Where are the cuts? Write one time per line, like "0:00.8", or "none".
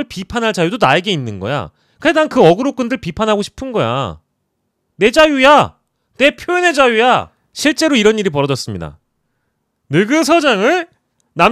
0:07.4